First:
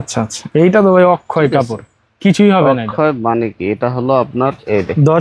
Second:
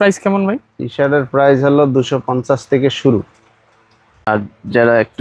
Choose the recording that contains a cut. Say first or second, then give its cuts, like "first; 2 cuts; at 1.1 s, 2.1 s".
second; 1 cut; at 4.3 s